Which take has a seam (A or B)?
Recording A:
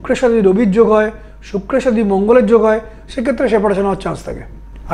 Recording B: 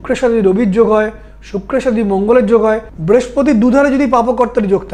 B